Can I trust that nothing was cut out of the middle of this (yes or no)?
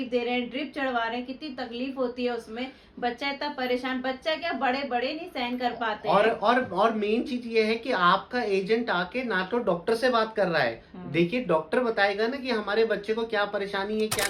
yes